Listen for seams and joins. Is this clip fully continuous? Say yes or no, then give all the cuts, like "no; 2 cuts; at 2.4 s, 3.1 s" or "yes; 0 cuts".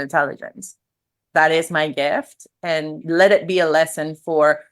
no; 2 cuts; at 1.1 s, 3.0 s